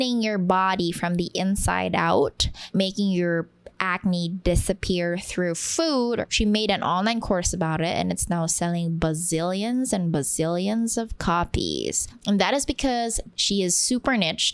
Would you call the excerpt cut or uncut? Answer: cut